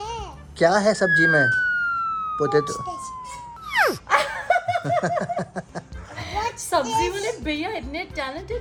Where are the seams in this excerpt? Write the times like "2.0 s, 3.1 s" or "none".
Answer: none